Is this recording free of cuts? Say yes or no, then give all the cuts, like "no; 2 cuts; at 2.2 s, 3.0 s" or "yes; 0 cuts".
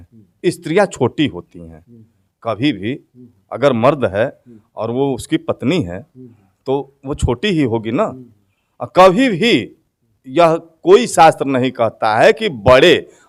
yes; 0 cuts